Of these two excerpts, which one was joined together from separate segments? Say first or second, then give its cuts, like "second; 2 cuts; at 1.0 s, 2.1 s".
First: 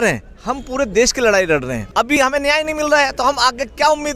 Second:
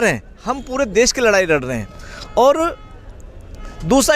first; 1 cut; at 1.8 s